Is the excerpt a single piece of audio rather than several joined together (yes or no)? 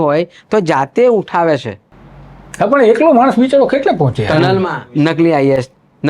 no